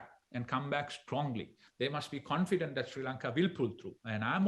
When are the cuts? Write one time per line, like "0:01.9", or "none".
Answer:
0:01.7